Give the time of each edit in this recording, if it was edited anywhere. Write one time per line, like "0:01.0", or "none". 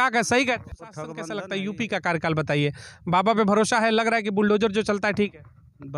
0:01.2